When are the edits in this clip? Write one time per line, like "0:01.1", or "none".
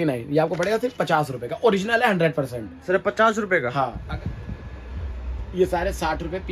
0:04.0